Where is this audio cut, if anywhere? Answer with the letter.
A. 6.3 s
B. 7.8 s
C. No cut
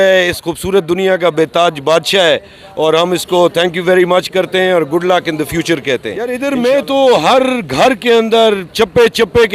A